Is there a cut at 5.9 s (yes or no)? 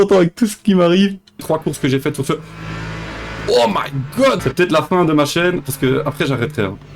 no